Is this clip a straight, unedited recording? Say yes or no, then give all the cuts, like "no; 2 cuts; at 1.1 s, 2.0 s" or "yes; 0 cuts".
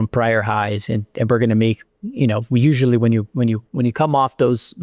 no; 1 cut; at 3.7 s